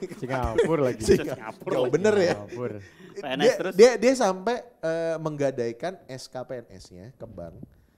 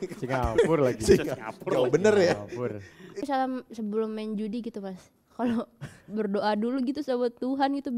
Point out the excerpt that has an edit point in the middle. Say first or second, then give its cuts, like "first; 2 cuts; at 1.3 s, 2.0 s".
second; 1 cut; at 3.2 s